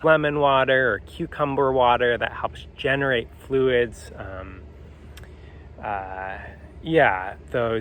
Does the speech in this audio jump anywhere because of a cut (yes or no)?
no